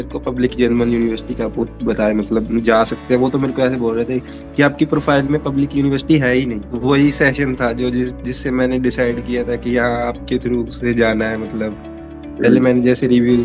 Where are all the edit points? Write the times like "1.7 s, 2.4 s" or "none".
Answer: 6.7 s